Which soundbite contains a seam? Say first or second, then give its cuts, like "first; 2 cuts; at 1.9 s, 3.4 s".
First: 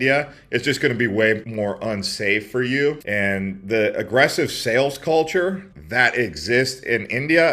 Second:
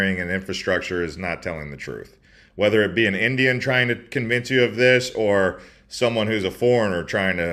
first; 1 cut; at 3.0 s